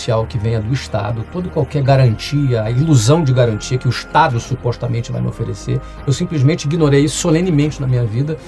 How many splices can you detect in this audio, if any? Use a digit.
0